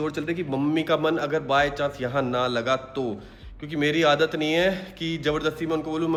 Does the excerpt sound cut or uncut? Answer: uncut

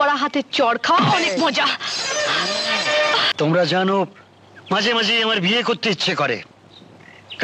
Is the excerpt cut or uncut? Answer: cut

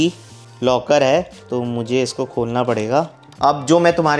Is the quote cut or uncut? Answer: cut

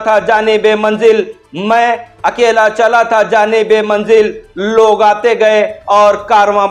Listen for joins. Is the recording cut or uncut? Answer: uncut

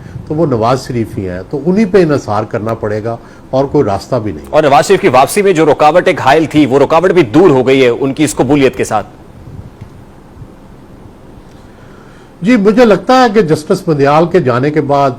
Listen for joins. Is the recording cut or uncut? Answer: uncut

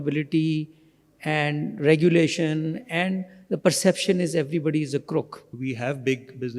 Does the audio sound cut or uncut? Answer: cut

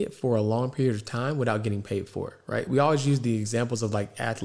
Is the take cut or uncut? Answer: uncut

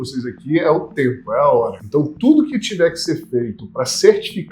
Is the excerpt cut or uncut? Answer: cut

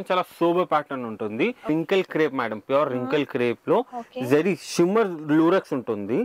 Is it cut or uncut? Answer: cut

